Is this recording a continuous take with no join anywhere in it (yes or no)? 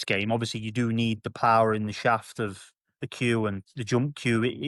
yes